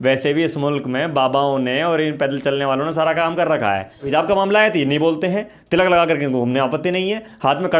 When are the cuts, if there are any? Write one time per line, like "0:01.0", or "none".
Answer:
0:04.1